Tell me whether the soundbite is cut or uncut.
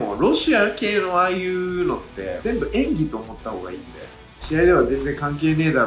cut